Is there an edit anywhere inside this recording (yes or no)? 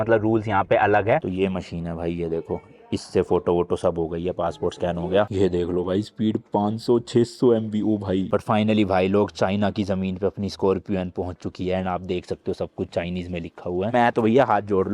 yes